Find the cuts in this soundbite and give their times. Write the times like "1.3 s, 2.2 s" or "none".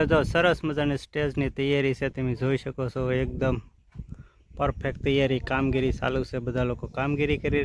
none